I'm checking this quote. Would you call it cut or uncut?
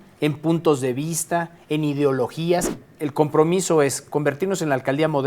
cut